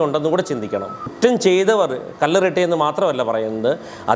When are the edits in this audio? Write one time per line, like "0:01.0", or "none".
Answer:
0:01.1